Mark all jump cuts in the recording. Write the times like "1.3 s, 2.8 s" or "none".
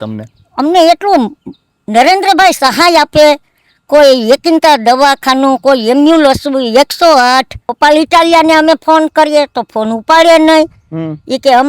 7.6 s